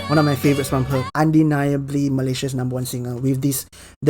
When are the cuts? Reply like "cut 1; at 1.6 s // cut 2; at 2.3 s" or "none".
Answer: cut 1; at 1.1 s